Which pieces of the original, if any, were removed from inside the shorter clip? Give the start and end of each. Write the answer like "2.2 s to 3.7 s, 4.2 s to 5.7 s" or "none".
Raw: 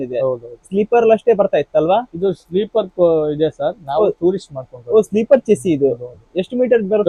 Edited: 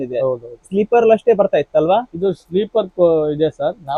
none